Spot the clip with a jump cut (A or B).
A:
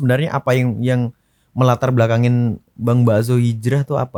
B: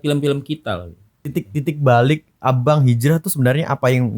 B